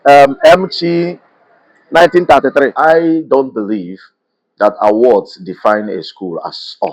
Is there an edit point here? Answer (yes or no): yes